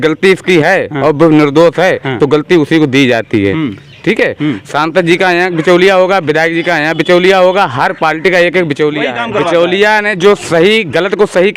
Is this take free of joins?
no; 1 cut; at 9.2 s

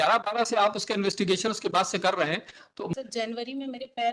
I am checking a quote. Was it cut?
yes; 1 cut; at 2.8 s

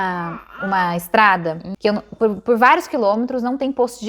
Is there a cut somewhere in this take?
yes; 1 cut; at 1.7 s

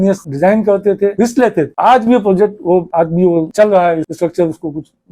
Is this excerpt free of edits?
yes; 0 cuts

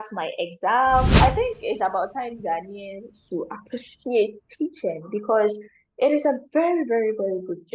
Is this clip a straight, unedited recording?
no; 1 cut; at 1.2 s

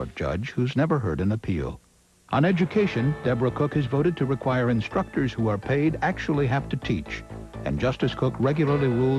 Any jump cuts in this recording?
yes; 1 cut; at 2.2 s

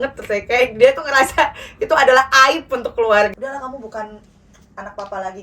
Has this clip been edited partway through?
yes; 1 cut; at 3.3 s

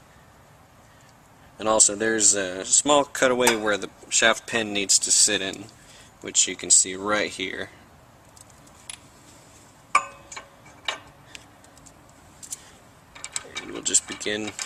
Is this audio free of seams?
yes; 0 cuts

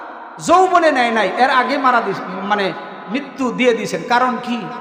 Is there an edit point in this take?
no; 0 cuts

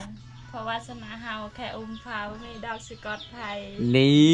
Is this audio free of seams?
yes; 0 cuts

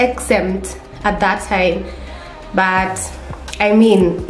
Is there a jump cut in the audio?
no; 0 cuts

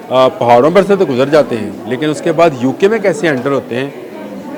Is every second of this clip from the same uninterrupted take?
yes; 0 cuts

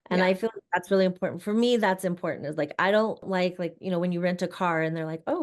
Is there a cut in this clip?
yes; 1 cut; at 3.3 s

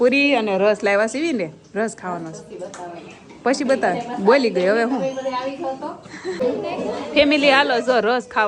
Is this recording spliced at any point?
no; 0 cuts

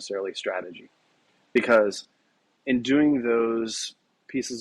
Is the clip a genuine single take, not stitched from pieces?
no; 1 cut; at 2.5 s

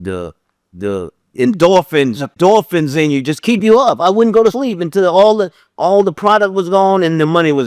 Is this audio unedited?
no; 1 cut; at 2.3 s

